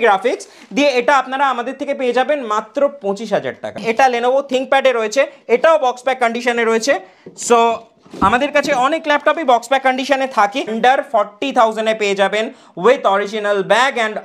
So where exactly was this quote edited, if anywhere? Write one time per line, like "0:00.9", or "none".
0:03.8
0:10.7